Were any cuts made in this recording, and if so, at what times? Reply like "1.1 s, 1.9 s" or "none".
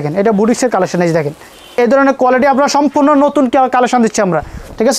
1.8 s